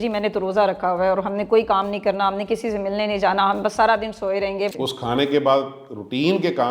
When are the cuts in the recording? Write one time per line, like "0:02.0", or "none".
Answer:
0:04.7